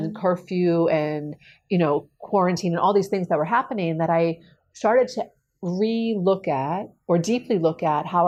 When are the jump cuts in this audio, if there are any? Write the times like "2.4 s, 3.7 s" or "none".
none